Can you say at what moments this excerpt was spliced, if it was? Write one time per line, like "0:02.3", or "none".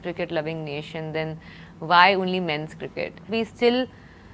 0:03.3